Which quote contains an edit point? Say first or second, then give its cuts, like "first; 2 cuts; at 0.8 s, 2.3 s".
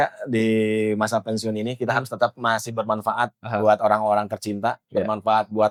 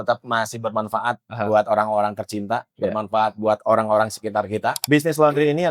second; 1 cut; at 4.8 s